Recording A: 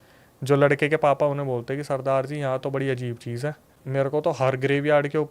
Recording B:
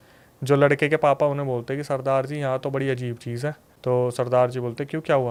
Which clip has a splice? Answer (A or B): A